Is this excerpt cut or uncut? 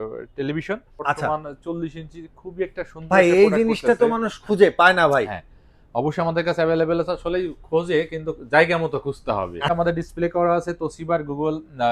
cut